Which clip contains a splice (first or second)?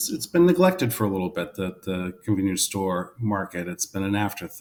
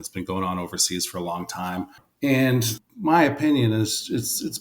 second